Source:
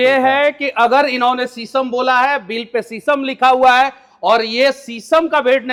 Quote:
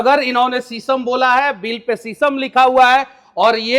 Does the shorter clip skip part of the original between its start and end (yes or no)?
no